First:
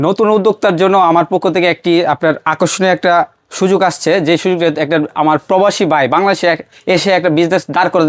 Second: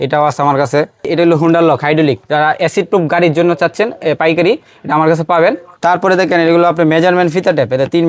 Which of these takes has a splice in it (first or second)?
second